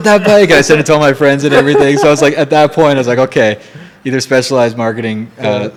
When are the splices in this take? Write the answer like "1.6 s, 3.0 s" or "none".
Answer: none